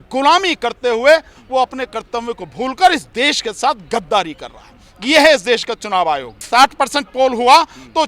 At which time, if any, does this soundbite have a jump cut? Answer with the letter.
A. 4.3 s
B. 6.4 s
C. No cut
B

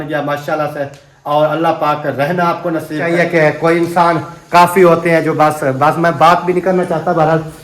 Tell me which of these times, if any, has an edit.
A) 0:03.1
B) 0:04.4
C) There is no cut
A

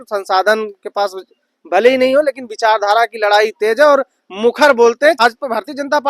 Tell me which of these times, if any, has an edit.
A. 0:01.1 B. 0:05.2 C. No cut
B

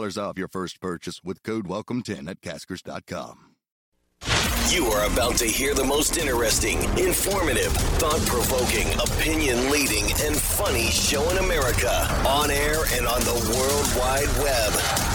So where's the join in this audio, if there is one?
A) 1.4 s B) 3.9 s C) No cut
B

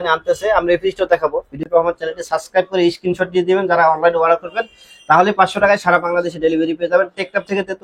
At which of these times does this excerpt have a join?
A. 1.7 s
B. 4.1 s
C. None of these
A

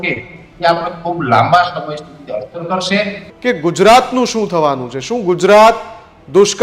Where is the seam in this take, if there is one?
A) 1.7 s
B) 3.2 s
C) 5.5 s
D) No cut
B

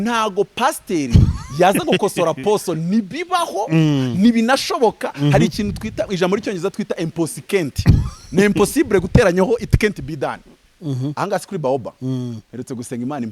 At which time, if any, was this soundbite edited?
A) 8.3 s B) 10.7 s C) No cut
B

